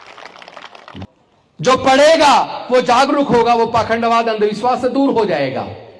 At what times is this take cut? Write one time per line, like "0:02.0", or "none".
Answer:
0:01.0